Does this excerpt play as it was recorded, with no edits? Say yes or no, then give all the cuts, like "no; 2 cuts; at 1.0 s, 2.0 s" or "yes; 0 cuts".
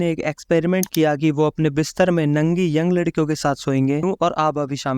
no; 1 cut; at 4.0 s